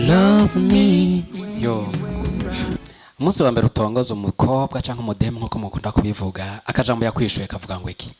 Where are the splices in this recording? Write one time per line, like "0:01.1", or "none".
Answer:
0:02.7